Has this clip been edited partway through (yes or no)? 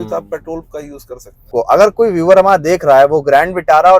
yes